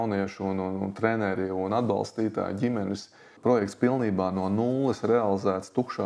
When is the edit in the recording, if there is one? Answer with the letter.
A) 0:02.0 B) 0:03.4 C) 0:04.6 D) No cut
B